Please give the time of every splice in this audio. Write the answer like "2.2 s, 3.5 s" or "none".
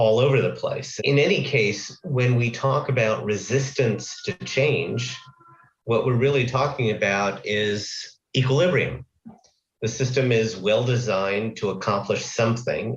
0.9 s, 4.4 s